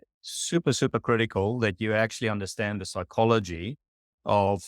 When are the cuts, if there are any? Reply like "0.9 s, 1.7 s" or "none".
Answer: none